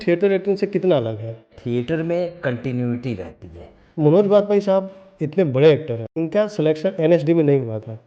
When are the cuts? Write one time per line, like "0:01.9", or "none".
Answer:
0:04.0